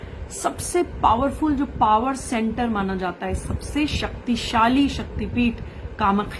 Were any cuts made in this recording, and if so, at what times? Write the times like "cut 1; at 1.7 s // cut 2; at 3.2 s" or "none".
none